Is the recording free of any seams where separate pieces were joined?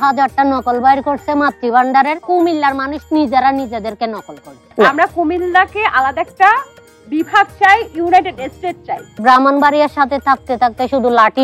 no; 3 cuts; at 2.2 s, 4.6 s, 9.2 s

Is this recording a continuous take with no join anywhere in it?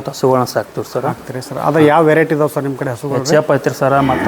yes; 0 cuts

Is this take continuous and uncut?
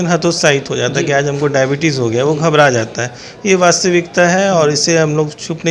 yes; 0 cuts

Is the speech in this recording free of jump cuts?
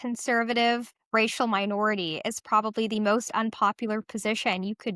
no; 1 cut; at 0.9 s

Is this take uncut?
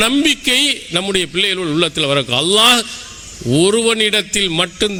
yes; 0 cuts

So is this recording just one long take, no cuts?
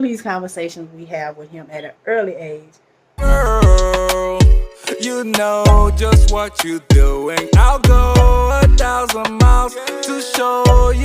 no; 1 cut; at 3.2 s

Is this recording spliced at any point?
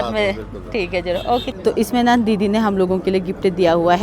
yes; 1 cut; at 1.5 s

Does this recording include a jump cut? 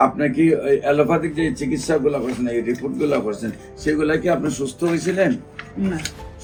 no; 0 cuts

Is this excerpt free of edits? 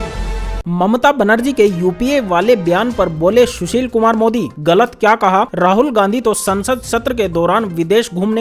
yes; 0 cuts

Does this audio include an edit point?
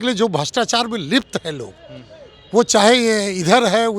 no; 0 cuts

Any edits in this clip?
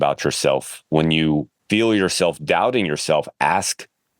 yes; 1 cut; at 1.6 s

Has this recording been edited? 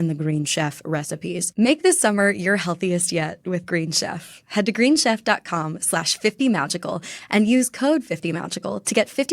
yes; 1 cut; at 1.4 s

